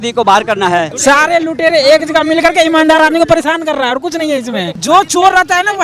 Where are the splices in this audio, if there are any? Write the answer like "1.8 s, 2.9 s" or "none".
0.9 s, 4.8 s

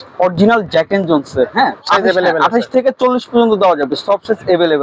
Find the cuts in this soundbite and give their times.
1.8 s

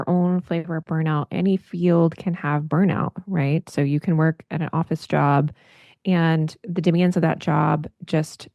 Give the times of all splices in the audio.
none

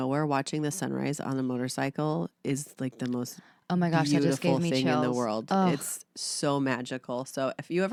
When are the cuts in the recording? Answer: none

